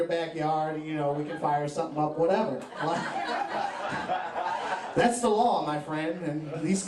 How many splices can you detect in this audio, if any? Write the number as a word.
one